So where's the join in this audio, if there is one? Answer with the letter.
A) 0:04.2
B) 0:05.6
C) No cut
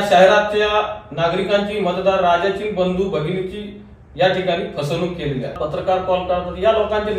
B